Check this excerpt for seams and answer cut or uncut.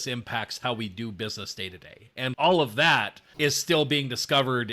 cut